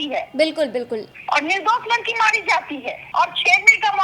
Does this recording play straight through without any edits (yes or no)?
no